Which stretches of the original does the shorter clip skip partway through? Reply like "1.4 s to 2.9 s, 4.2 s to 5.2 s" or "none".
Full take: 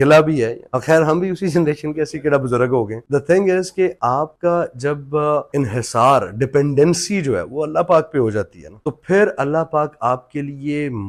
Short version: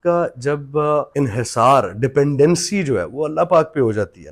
none